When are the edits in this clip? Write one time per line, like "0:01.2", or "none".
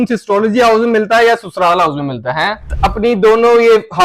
0:02.7

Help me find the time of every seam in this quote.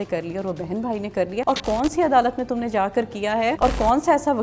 0:01.4
0:03.6

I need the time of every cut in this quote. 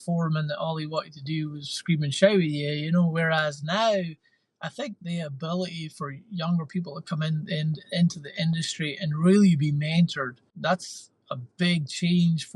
0:10.5

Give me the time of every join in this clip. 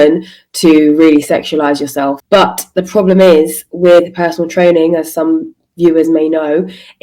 0:02.2

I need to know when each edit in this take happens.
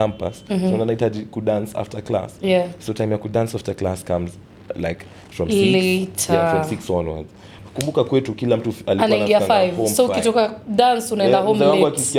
none

